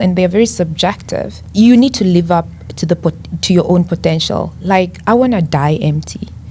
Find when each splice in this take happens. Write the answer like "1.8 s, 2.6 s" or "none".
1.4 s